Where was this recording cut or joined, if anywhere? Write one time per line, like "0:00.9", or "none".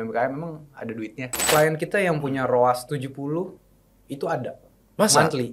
0:01.3